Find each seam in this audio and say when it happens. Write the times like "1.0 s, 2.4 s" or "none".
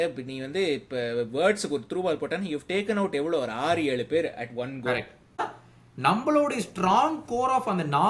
5.4 s